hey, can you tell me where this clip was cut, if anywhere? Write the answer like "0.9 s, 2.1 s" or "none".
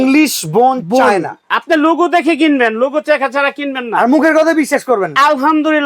none